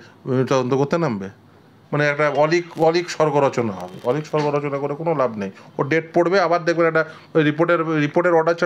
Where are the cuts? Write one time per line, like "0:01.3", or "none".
0:01.6